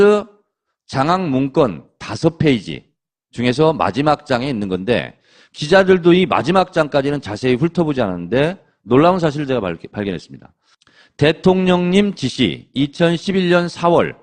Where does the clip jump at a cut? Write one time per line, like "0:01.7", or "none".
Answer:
none